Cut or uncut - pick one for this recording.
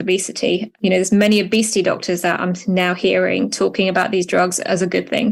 uncut